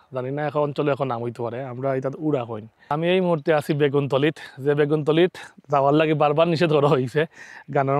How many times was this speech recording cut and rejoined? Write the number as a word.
one